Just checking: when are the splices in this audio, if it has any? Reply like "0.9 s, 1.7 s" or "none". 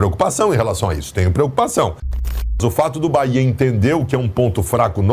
2.2 s